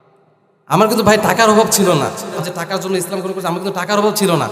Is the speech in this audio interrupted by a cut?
yes; 1 cut; at 2.4 s

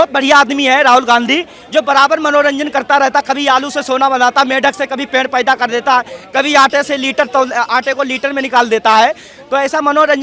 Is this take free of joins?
yes; 0 cuts

